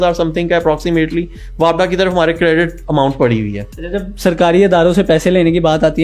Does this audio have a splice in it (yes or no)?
no